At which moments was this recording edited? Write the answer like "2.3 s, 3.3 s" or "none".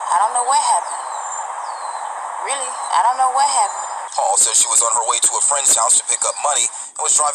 none